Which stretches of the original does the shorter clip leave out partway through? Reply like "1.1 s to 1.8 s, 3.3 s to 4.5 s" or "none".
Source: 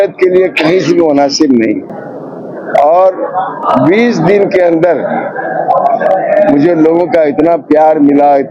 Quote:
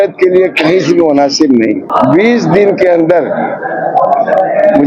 1.8 s to 3.6 s